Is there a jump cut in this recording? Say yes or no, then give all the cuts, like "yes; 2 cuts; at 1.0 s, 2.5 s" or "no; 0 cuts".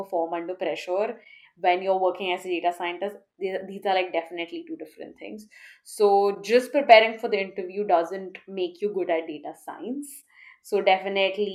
no; 0 cuts